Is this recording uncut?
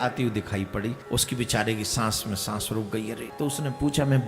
no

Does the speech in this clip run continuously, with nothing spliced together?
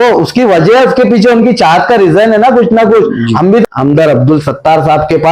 no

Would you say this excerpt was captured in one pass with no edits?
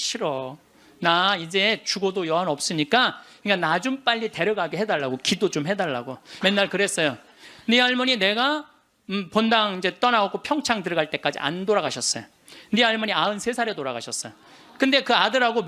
no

